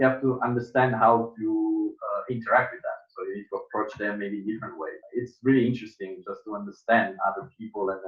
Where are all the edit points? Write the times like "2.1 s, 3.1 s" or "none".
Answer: 5.0 s